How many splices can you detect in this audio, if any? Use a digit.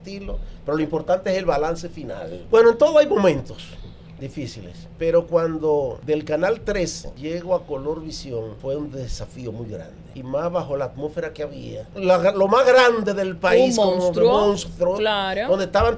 7